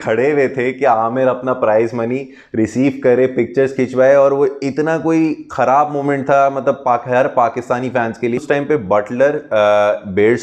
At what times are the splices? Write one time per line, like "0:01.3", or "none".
0:08.4